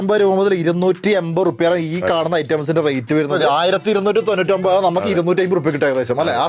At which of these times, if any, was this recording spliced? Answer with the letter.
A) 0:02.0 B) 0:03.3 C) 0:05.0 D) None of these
B